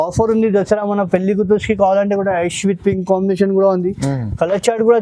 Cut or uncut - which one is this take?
uncut